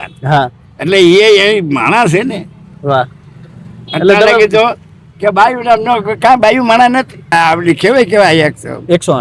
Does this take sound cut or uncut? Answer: cut